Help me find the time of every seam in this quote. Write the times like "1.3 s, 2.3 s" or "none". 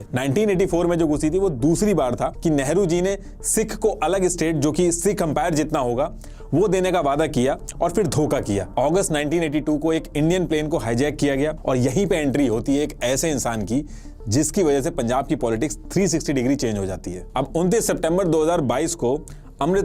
2.3 s, 8.7 s, 11.6 s, 17.2 s